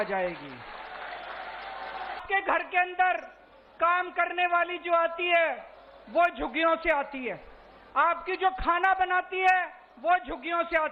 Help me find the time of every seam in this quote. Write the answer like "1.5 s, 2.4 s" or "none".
2.2 s